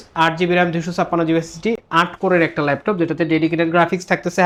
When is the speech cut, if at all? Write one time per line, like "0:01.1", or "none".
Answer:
none